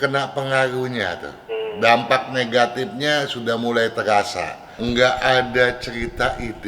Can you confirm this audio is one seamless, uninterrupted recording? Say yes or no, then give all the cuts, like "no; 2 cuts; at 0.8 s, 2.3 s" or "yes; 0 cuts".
no; 1 cut; at 4.8 s